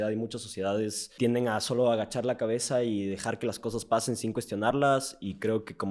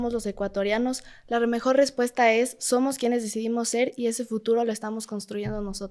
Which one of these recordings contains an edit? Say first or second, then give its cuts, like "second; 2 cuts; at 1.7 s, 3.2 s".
first; 1 cut; at 1.1 s